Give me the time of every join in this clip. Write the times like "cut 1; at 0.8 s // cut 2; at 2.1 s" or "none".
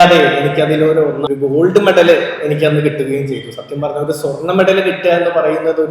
cut 1; at 1.2 s

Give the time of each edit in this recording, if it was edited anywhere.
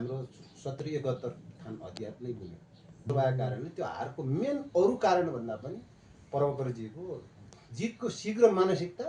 cut 1; at 3.1 s

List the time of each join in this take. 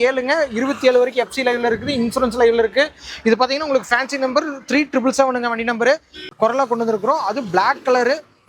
cut 1; at 6.2 s

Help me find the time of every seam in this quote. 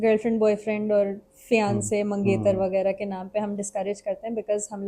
none

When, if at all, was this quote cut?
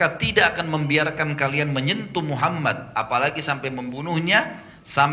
none

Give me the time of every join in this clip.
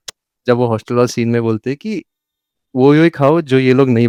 none

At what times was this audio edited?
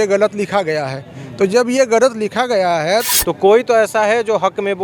cut 1; at 3.1 s

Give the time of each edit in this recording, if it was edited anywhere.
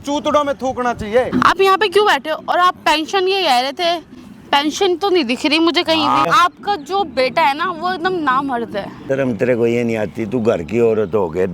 cut 1; at 1.3 s // cut 2; at 6.3 s // cut 3; at 9.0 s

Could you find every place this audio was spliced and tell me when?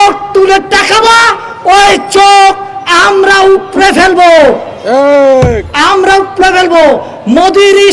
none

